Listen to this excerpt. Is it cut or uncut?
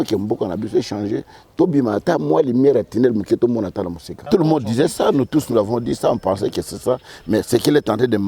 cut